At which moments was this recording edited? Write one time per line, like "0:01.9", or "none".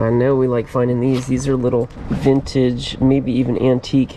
0:02.0